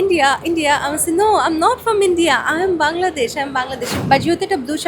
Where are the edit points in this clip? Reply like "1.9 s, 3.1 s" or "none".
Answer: 3.9 s